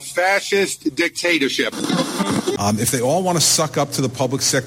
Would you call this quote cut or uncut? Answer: cut